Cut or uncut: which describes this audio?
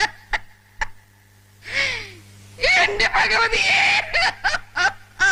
uncut